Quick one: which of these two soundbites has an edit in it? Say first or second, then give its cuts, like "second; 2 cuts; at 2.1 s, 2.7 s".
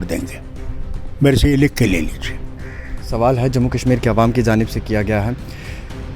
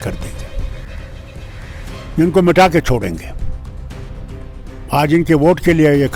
first; 1 cut; at 3.0 s